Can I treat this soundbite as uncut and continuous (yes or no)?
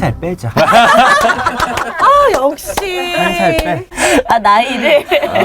yes